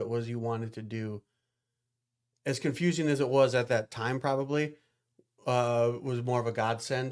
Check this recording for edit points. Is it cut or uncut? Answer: uncut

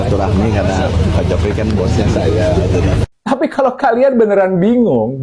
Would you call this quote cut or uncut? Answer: cut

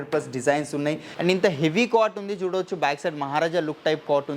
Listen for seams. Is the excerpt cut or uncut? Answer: cut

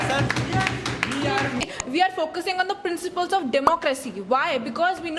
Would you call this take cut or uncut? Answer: cut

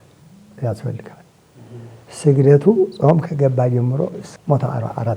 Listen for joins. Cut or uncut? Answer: cut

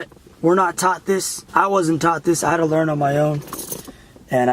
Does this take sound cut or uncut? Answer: cut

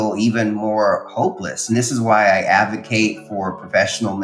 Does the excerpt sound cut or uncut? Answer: cut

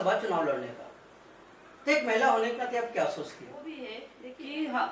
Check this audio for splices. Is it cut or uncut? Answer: cut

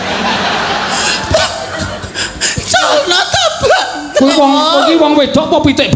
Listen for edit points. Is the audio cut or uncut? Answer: uncut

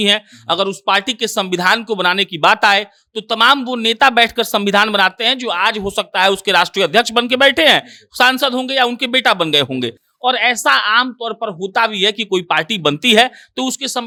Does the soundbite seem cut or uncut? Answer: uncut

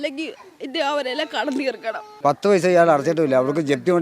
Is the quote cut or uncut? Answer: cut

